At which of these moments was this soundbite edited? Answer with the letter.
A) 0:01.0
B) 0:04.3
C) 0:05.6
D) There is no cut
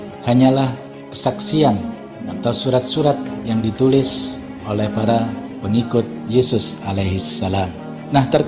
D